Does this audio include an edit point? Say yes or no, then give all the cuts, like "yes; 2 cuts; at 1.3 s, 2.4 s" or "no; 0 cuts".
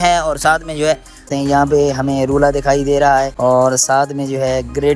yes; 2 cuts; at 1.3 s, 3.3 s